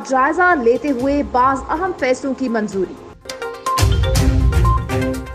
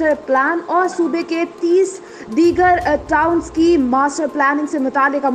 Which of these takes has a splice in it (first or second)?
first